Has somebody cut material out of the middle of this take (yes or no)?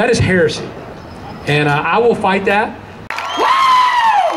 yes